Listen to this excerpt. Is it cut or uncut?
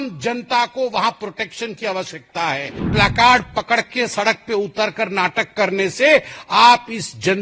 cut